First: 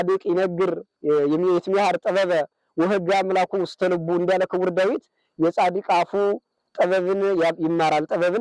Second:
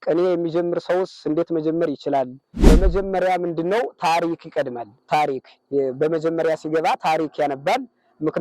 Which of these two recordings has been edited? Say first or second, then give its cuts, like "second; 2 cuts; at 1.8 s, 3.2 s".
second; 1 cut; at 2.6 s